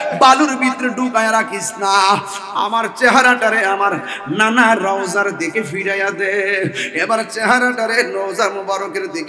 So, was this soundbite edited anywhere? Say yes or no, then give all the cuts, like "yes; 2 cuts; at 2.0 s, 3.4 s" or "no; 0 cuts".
no; 0 cuts